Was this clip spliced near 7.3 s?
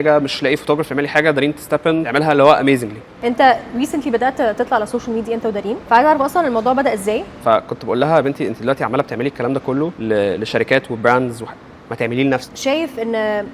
yes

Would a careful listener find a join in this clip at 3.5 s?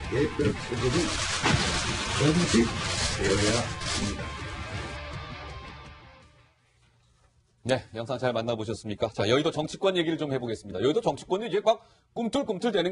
no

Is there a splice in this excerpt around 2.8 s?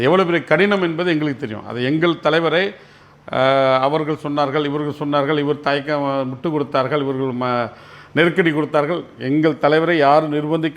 no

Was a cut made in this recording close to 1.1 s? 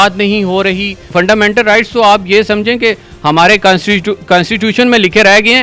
yes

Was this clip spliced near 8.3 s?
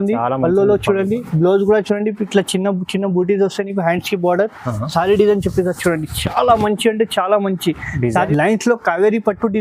yes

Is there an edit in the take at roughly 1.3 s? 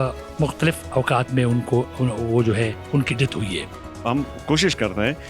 no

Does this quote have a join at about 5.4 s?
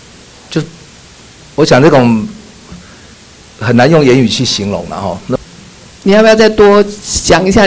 yes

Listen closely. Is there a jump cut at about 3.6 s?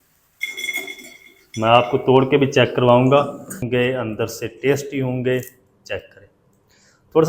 yes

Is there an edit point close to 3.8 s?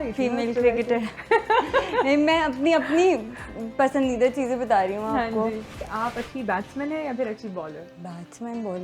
no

